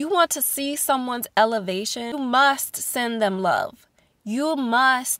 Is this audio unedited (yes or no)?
no